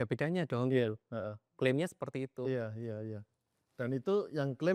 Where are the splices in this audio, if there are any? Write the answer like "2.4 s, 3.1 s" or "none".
none